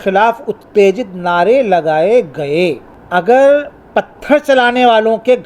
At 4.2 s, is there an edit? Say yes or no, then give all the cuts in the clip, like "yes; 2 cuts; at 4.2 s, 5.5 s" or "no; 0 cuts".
no; 1 cut; at 2.9 s